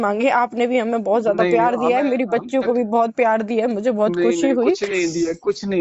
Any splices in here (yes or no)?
no